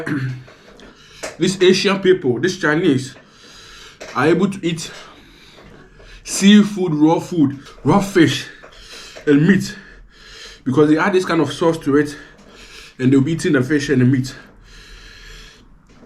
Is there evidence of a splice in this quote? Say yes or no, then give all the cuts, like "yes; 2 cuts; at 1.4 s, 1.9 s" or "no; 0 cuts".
yes; 1 cut; at 7.7 s